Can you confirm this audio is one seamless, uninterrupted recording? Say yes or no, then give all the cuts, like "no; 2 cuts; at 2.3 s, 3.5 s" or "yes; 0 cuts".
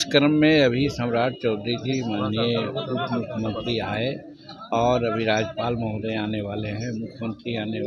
yes; 0 cuts